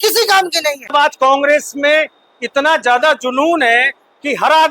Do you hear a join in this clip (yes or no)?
yes